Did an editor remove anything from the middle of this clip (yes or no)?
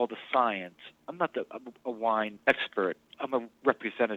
yes